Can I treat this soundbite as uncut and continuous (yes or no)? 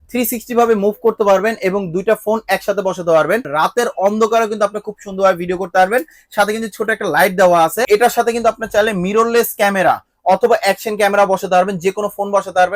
no